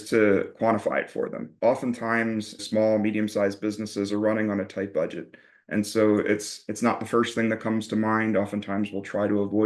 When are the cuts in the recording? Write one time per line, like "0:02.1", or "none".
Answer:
0:01.5
0:02.6